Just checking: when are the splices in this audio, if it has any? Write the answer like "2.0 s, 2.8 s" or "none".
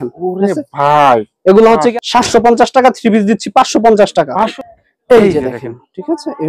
1.9 s, 4.5 s